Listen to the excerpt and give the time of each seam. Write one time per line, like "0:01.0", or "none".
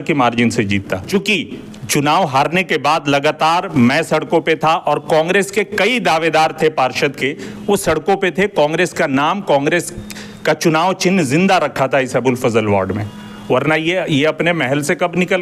none